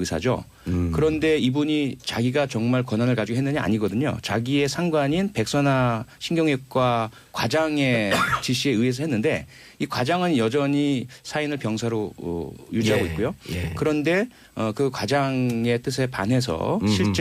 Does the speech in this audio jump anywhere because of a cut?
yes; 1 cut; at 7.2 s

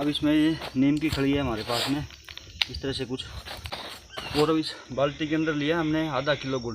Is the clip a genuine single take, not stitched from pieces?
no; 1 cut; at 3.8 s

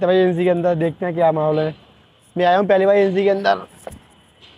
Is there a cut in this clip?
no; 0 cuts

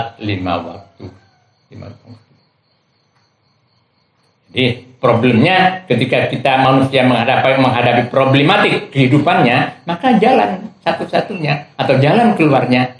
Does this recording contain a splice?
no; 0 cuts

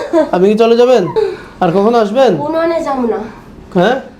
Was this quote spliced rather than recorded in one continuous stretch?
yes; 1 cut; at 1.1 s

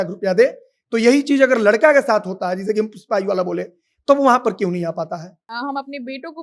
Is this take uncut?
no; 1 cut; at 5.5 s

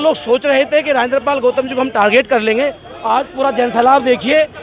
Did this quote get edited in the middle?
no; 0 cuts

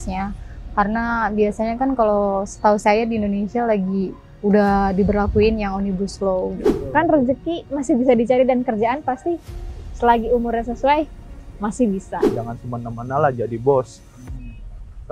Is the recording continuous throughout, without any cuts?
no; 2 cuts; at 6.6 s, 12.3 s

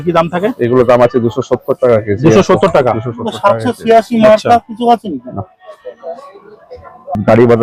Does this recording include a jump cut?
no; 0 cuts

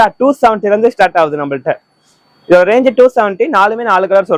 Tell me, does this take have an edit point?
no; 0 cuts

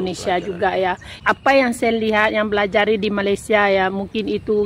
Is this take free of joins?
no; 1 cut; at 1.1 s

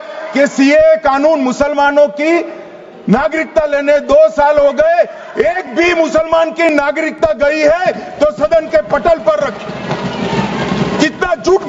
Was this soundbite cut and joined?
no; 0 cuts

